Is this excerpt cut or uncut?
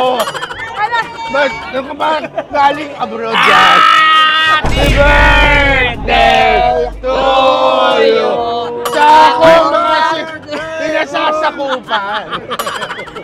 uncut